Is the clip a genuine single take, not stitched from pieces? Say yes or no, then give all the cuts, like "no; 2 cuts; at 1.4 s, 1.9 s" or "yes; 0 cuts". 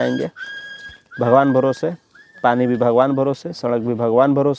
yes; 0 cuts